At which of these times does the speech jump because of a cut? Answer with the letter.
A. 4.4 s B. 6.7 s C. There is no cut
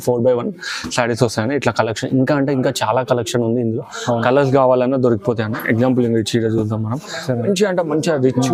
C